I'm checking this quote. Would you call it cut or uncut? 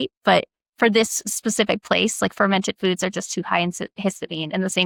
uncut